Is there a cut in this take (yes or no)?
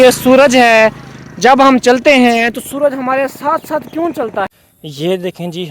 yes